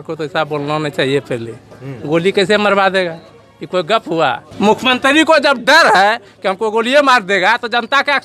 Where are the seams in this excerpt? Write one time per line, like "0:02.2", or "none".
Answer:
0:04.5